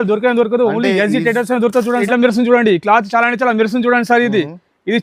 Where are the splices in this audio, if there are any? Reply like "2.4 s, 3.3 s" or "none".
2.0 s